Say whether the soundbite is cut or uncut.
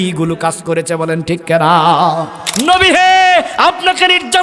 cut